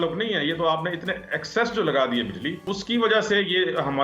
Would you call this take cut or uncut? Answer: cut